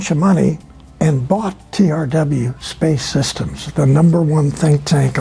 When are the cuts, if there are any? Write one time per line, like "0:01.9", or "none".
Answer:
none